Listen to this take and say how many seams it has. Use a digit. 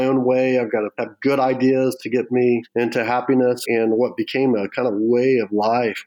3